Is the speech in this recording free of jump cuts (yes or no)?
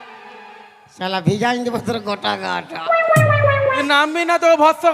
no